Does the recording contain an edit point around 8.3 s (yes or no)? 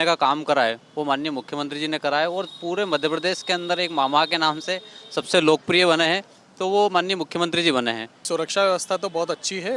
yes